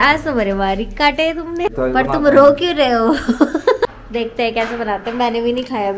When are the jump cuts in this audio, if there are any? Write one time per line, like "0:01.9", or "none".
0:01.7
0:03.9